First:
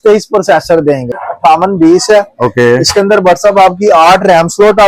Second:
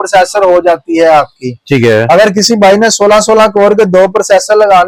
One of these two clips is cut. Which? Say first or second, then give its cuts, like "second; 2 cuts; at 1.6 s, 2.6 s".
first; 1 cut; at 1.2 s